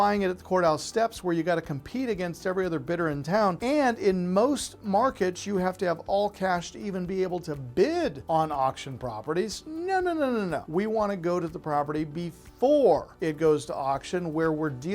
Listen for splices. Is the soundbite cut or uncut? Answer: cut